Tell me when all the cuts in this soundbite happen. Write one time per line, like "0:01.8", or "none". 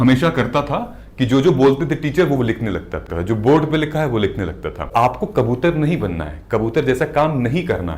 0:03.0
0:04.9

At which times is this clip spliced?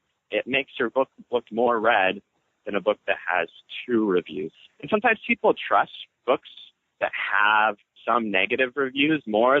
0:04.5
0:06.1

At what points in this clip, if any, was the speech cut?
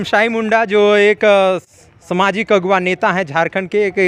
none

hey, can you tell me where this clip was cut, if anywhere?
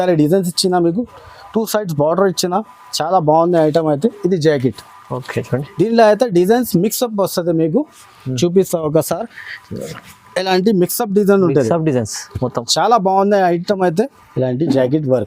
0:14.2

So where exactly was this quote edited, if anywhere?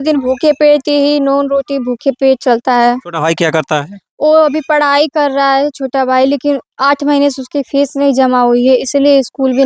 0:03.1

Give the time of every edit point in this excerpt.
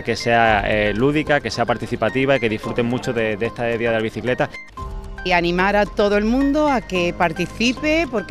0:04.9

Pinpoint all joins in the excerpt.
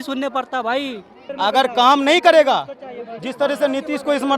0:01.2

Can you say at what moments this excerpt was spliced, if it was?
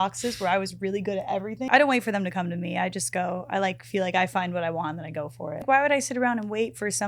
0:01.7
0:05.6

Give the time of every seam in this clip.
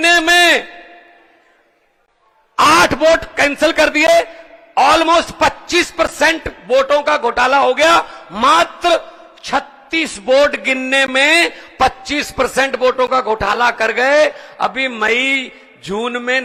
none

